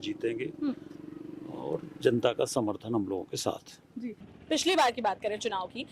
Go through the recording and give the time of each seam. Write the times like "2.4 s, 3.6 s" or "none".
none